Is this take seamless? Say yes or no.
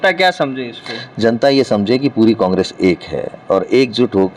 yes